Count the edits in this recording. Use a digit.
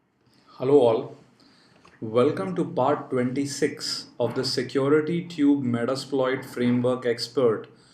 0